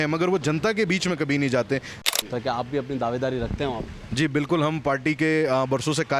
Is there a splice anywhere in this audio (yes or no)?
yes